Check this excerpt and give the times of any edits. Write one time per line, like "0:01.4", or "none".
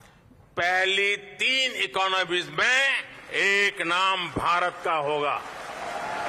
none